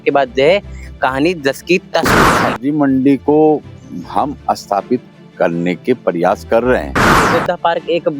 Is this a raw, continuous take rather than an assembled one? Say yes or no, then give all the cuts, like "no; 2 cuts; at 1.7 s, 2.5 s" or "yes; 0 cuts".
no; 2 cuts; at 2.3 s, 7.3 s